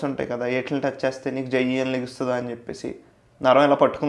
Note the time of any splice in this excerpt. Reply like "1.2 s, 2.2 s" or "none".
none